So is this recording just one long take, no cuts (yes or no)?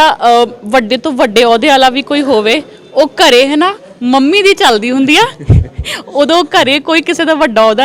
yes